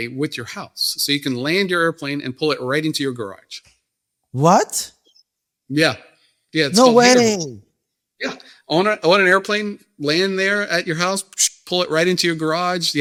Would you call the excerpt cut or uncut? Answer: uncut